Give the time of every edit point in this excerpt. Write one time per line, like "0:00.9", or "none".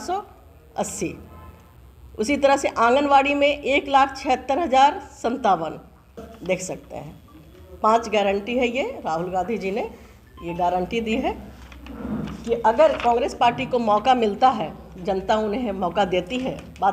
0:06.2